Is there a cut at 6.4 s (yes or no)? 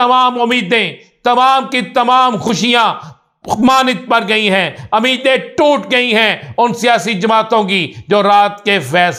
no